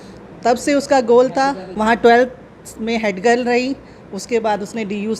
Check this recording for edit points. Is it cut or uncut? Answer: uncut